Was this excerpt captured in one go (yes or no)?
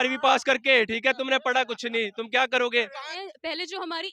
no